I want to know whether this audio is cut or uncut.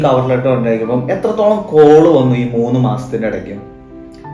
uncut